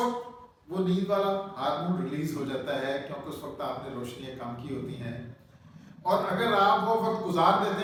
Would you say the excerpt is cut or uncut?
uncut